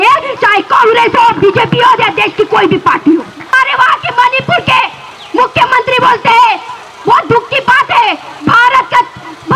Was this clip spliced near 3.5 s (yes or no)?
yes